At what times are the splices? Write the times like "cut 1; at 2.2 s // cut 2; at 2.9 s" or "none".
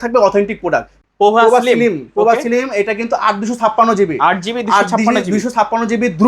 cut 1; at 1.0 s